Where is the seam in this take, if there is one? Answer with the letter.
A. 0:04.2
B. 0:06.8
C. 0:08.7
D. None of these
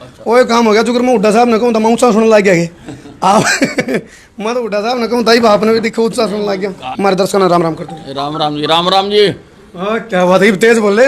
B